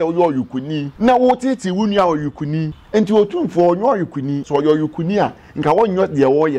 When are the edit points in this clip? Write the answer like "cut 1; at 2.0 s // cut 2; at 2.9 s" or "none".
cut 1; at 0.9 s // cut 2; at 2.8 s // cut 3; at 4.4 s